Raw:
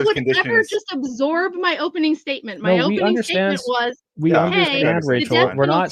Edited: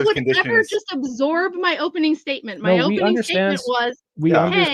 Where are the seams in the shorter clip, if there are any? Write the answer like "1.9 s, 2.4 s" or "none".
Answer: none